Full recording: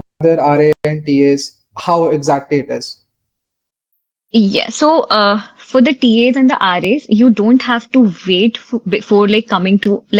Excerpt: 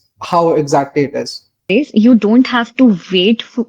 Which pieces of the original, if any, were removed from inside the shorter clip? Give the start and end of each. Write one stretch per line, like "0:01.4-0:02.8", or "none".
0:03.2-0:06.8